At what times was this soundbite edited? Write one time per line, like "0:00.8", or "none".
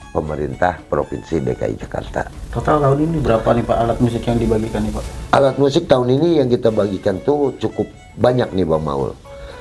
none